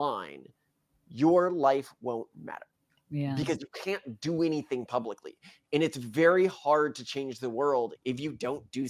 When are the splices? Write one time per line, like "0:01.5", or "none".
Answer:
0:08.0